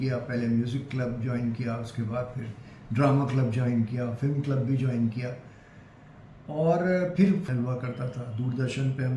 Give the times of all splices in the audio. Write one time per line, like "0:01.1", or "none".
0:07.4